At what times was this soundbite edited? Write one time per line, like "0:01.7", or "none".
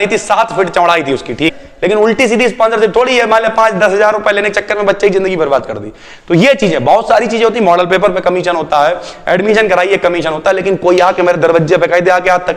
0:01.5

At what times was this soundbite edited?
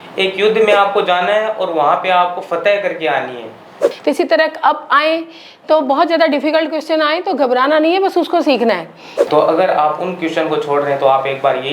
0:03.8
0:09.1

